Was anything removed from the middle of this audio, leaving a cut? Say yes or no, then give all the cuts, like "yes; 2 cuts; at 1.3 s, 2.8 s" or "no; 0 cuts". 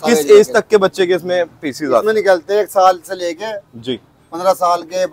no; 0 cuts